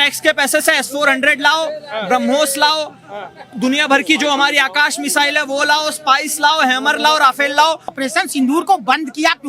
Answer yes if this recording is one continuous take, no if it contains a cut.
no